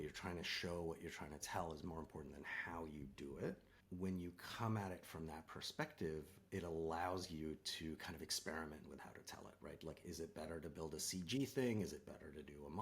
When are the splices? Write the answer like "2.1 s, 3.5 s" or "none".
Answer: 3.7 s